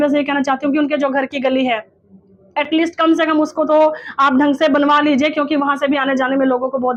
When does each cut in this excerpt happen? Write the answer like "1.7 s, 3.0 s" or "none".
none